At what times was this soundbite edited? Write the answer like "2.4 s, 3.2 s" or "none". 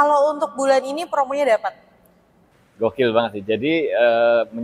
2.0 s